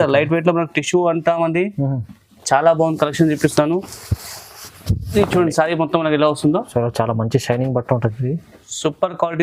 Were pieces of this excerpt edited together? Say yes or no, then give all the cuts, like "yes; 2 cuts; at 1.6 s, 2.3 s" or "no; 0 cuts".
no; 0 cuts